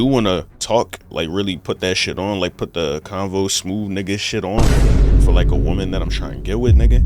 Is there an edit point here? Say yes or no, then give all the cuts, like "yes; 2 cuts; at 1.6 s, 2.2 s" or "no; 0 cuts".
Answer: yes; 1 cut; at 1.0 s